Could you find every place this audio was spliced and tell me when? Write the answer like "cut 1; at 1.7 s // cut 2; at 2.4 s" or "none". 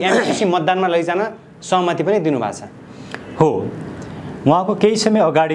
none